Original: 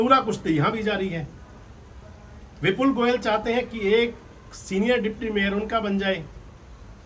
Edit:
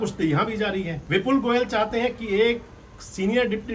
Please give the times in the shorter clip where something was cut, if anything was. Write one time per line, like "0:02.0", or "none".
0:01.0